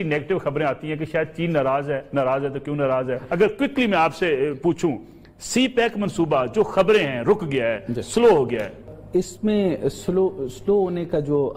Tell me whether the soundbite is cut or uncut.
uncut